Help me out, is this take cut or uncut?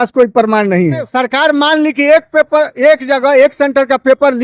cut